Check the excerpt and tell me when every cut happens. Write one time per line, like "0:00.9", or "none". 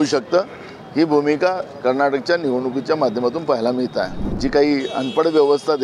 0:04.3

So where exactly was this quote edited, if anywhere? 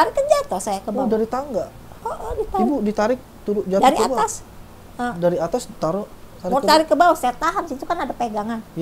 none

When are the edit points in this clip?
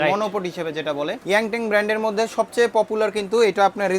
0:01.2

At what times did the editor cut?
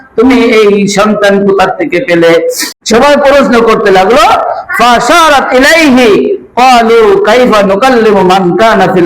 0:02.7

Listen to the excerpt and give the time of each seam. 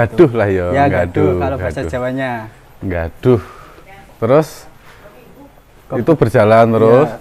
none

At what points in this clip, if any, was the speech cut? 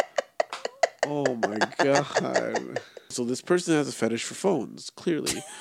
0:03.1

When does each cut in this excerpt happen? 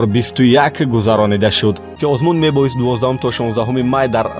0:01.9

